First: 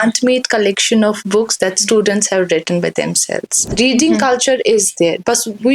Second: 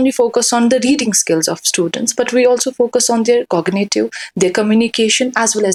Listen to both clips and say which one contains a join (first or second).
first